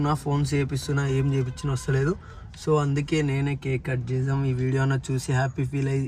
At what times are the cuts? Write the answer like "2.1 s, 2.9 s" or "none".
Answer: none